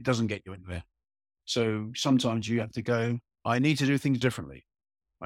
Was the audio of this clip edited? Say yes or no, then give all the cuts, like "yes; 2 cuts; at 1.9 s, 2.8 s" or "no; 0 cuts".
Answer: no; 0 cuts